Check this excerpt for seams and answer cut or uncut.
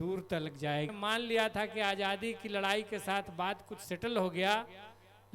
cut